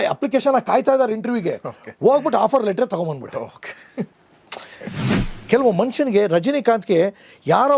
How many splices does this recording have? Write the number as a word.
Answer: one